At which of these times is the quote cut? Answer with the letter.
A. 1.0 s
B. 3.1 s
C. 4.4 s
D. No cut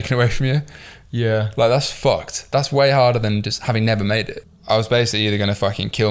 C